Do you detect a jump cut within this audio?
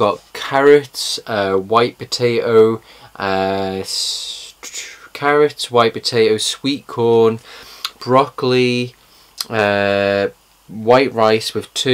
yes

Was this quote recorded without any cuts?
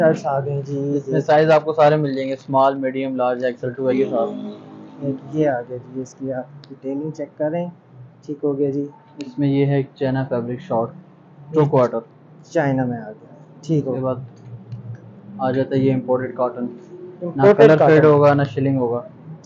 no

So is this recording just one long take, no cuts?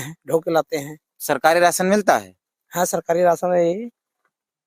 yes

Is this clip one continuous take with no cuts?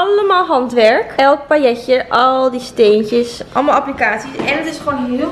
yes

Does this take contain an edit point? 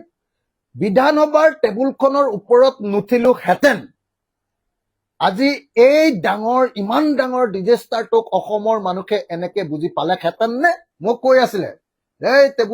yes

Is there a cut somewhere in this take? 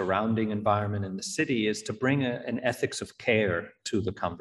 no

